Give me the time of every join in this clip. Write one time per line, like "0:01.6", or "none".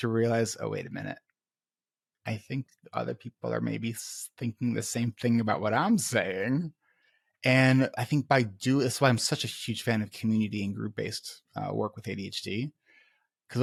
none